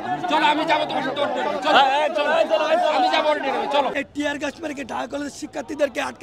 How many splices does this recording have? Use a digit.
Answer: 1